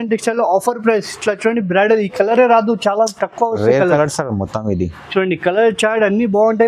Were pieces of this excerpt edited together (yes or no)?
no